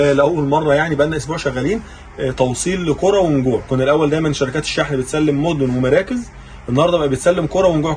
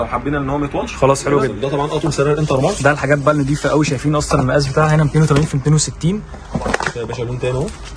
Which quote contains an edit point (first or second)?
second